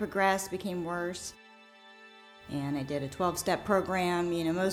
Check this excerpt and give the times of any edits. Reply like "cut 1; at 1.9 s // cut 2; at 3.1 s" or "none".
cut 1; at 2.0 s